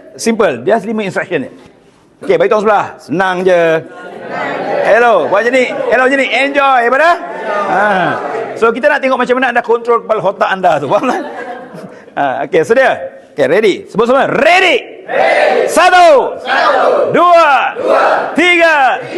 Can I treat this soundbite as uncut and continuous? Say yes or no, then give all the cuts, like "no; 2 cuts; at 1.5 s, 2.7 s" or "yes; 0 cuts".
yes; 0 cuts